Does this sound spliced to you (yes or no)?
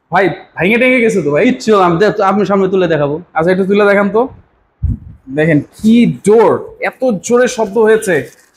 no